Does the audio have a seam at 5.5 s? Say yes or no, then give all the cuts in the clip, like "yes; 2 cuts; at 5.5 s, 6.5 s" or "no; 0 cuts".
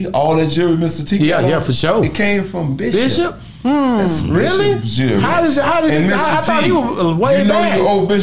no; 0 cuts